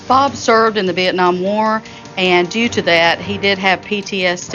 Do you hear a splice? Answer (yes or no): no